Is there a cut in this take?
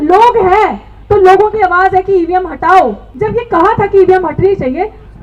yes; 1 cut; at 3.1 s

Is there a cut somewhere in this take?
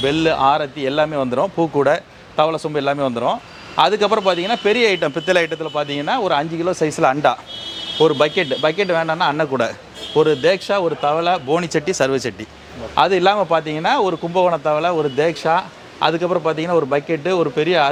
no; 0 cuts

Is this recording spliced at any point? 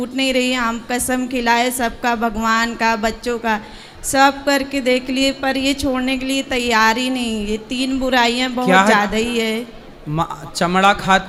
no; 0 cuts

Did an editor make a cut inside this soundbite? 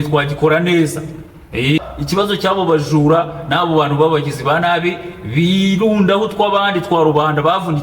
yes; 1 cut; at 1.8 s

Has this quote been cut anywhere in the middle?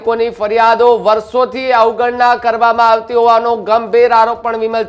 no; 0 cuts

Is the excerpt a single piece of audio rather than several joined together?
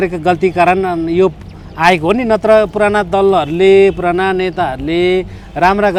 yes; 0 cuts

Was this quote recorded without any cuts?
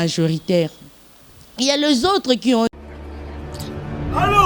no; 1 cut; at 2.7 s

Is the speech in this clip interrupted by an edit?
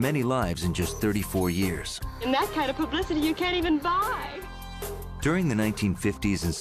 no; 0 cuts

